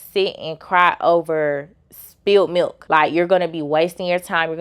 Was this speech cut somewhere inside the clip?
yes; 1 cut; at 2.8 s

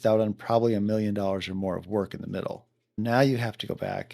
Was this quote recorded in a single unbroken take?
no; 1 cut; at 3.0 s

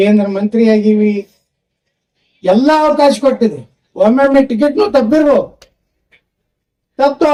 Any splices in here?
no; 0 cuts

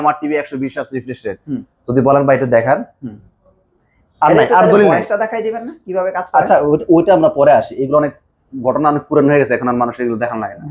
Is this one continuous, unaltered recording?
yes; 0 cuts

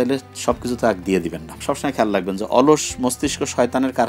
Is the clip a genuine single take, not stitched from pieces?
no; 1 cut; at 1.5 s

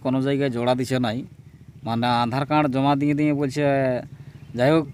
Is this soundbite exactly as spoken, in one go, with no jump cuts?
yes; 0 cuts

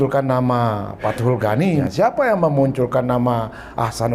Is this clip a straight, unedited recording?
no; 1 cut; at 1.9 s

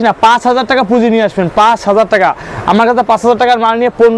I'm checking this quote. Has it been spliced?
no; 0 cuts

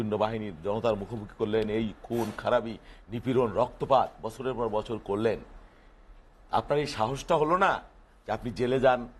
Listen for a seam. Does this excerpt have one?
no; 0 cuts

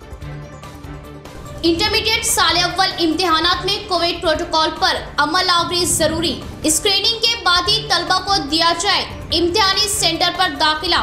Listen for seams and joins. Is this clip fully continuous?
no; 1 cut; at 1.3 s

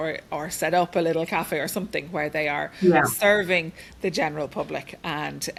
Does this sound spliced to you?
no; 0 cuts

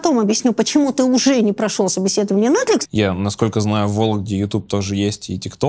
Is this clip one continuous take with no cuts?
no; 1 cut; at 2.8 s

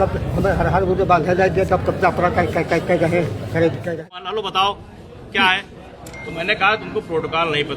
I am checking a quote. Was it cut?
yes; 1 cut; at 4.0 s

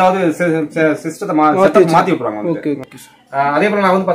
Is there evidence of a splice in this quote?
yes; 1 cut; at 2.9 s

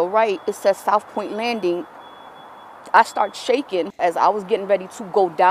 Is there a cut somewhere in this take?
yes; 1 cut; at 3.9 s

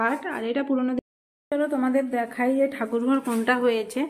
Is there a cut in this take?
yes; 1 cut; at 1.0 s

